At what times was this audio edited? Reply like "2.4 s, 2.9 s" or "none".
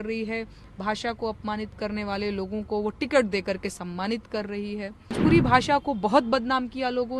5.2 s